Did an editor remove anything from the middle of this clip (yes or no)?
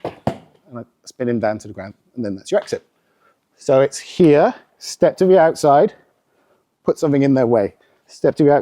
no